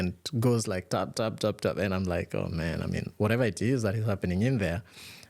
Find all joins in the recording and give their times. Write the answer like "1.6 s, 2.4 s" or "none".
none